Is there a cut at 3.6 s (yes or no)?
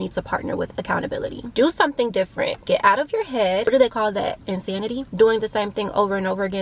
yes